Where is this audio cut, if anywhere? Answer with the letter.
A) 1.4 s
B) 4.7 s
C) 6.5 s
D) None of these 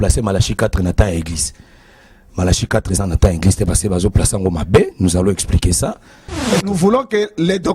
C